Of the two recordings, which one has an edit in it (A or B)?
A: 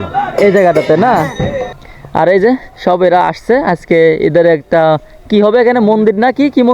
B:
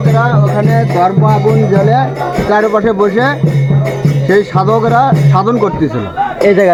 A